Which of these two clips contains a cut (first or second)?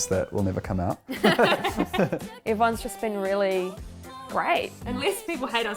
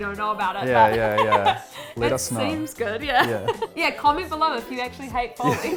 first